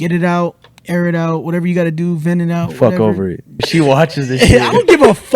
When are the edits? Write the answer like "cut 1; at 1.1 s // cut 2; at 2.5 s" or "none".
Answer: cut 1; at 3.7 s